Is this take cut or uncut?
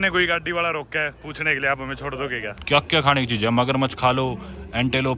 cut